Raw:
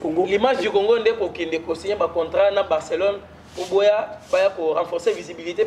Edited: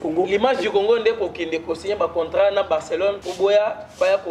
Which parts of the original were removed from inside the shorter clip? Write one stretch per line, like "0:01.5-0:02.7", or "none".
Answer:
0:03.3-0:03.6